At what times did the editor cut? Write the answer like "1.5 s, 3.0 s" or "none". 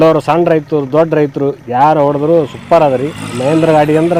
none